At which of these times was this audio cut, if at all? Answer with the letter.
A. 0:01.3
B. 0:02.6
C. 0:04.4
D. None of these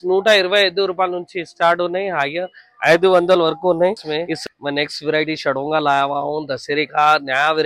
C